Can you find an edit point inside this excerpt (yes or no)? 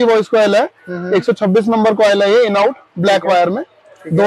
no